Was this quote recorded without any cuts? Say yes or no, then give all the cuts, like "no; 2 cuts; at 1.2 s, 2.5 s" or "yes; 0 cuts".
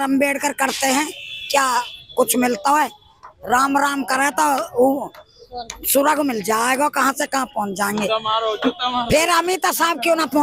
yes; 0 cuts